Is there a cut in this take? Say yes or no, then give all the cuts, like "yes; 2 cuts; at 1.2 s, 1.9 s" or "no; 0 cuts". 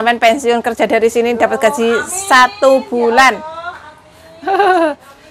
no; 0 cuts